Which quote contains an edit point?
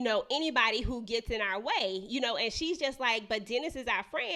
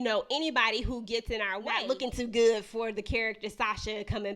second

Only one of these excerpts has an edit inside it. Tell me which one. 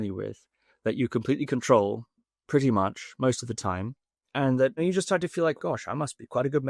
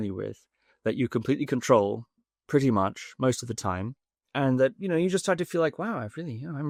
first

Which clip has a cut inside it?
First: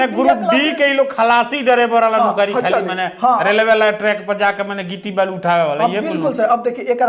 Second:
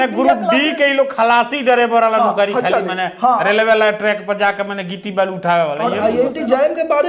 second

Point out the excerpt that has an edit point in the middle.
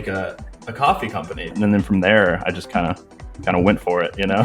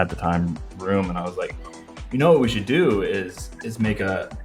first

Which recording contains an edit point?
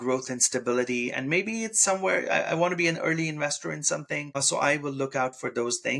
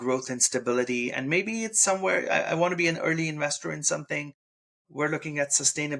second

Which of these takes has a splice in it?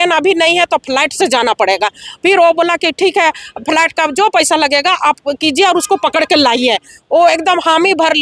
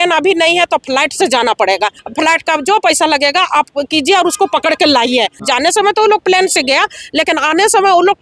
second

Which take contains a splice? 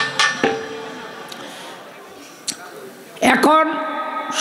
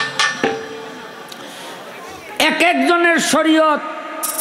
first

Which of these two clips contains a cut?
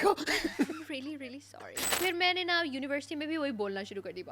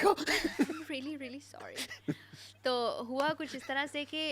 first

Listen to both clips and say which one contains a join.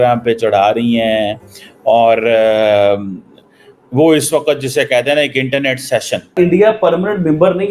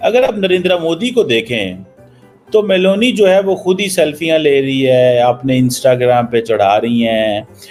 first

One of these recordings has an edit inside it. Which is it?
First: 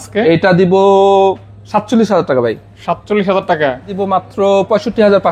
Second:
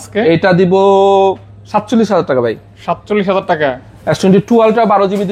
first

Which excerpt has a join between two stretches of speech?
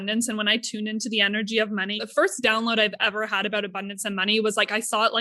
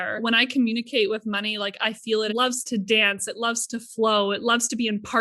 first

